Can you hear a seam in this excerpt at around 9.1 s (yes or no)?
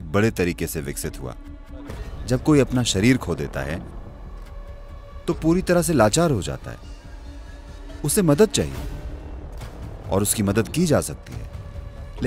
no